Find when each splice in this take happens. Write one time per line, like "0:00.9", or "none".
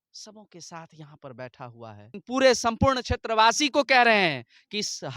0:02.2